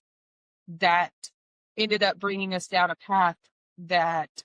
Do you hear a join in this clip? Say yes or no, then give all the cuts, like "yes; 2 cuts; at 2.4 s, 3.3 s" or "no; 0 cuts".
no; 0 cuts